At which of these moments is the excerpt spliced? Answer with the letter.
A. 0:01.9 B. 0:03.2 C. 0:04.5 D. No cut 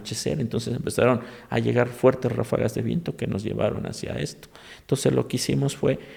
D